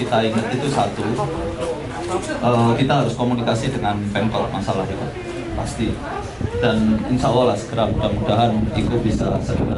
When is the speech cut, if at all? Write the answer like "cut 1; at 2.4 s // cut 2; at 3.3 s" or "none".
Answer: none